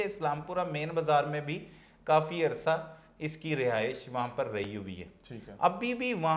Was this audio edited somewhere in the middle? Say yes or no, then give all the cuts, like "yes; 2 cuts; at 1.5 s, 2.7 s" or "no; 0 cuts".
no; 0 cuts